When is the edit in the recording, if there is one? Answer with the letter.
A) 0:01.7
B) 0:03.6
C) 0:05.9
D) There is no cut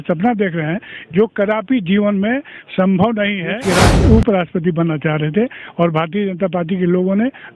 B